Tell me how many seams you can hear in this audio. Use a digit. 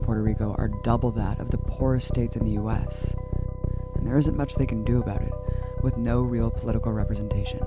0